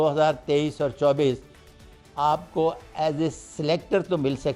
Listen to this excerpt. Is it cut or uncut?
cut